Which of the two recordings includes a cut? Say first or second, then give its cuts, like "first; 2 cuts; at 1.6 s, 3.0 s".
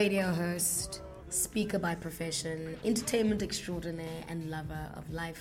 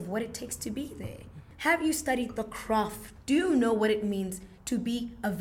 second; 2 cuts; at 1.4 s, 3.1 s